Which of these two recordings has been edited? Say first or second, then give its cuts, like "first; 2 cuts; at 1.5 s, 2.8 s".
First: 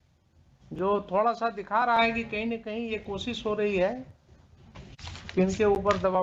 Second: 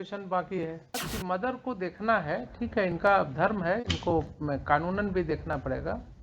second; 1 cut; at 1.0 s